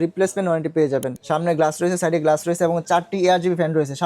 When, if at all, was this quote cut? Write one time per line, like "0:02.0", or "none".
0:01.1